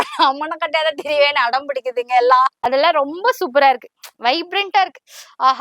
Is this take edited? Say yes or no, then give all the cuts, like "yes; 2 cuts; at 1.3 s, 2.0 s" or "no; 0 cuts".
yes; 1 cut; at 2.6 s